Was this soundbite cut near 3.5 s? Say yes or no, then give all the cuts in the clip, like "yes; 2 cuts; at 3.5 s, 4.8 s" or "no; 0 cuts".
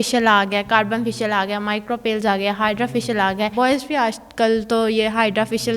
yes; 1 cut; at 3.5 s